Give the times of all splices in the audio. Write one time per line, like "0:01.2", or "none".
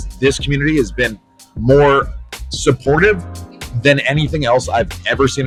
none